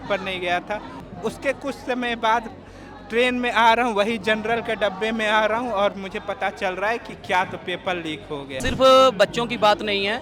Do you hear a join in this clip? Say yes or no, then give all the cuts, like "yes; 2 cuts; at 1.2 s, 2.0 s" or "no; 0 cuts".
yes; 2 cuts; at 1.0 s, 8.6 s